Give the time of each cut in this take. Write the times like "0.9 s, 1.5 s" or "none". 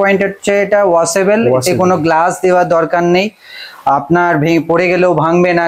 none